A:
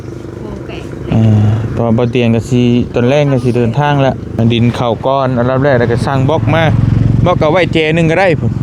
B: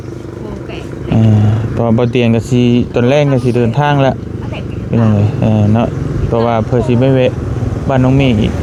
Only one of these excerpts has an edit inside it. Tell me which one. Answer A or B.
A